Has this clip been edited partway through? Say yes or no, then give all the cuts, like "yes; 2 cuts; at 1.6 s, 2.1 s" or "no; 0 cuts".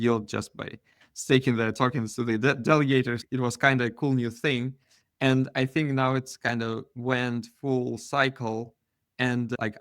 yes; 1 cut; at 3.2 s